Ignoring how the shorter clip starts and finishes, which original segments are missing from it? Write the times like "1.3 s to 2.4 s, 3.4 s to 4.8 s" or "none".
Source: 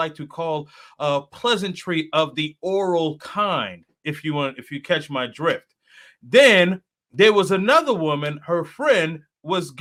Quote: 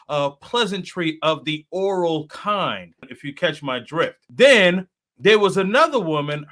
4.0 s to 4.6 s, 5.7 s to 6.2 s

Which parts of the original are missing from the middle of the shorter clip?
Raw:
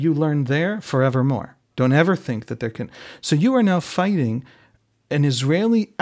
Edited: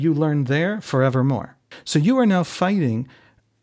1.6 s to 2.9 s

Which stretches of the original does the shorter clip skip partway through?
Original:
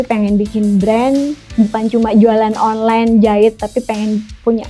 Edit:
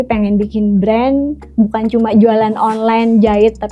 none

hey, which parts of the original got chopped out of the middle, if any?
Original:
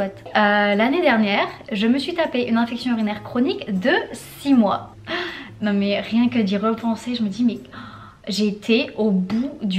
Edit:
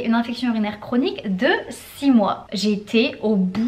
4.9 s to 8.2 s

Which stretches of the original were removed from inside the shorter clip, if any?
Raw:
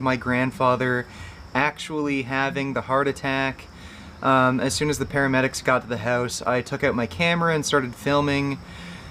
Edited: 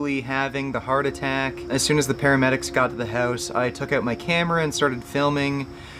3.7 s to 4.6 s

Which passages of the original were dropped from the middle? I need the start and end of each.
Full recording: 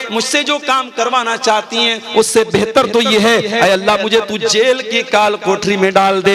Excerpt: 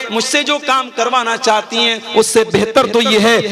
none

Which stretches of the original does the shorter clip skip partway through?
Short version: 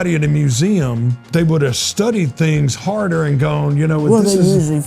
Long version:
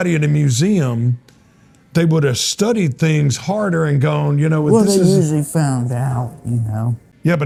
1.1 s to 1.8 s

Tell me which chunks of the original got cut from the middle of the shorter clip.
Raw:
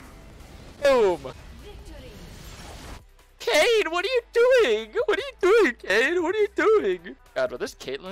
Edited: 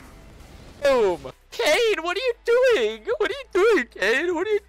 1.4 s to 3.2 s

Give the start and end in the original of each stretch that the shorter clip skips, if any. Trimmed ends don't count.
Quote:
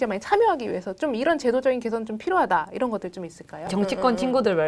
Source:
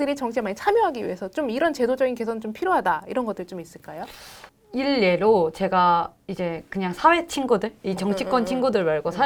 4.0 s to 8.0 s

